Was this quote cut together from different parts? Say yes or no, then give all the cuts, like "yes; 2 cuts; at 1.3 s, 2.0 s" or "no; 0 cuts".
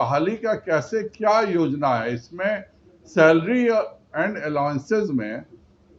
no; 0 cuts